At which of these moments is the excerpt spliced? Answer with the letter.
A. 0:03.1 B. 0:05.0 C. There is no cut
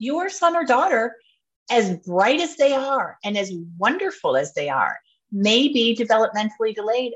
B